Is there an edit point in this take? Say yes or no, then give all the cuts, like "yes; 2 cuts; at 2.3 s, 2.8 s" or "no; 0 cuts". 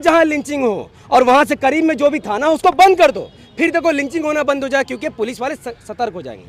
no; 0 cuts